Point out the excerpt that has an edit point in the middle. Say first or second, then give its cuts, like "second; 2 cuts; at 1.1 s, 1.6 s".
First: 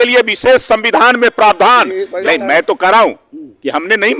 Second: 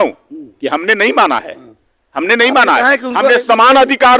first; 1 cut; at 2.0 s